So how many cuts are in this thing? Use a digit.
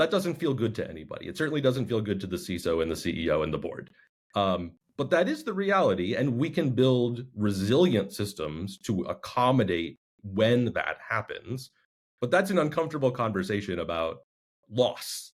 0